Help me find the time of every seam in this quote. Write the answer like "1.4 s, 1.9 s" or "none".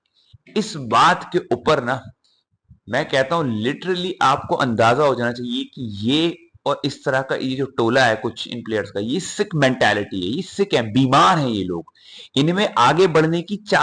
none